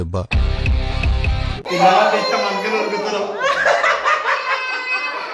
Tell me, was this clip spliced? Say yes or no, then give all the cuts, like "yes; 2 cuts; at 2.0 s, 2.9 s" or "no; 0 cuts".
no; 0 cuts